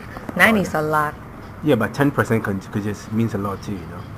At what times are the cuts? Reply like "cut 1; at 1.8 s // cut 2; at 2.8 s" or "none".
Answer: cut 1; at 1.9 s